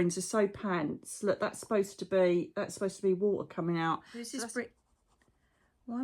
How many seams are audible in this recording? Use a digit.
1